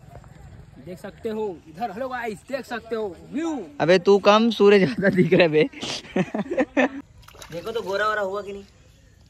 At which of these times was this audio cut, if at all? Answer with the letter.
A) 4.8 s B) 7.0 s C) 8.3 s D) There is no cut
B